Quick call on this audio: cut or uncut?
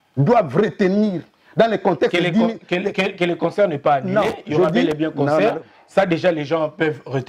uncut